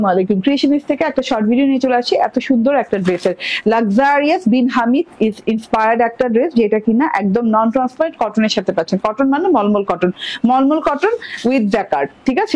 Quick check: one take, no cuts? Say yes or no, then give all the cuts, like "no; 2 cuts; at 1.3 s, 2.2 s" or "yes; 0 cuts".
yes; 0 cuts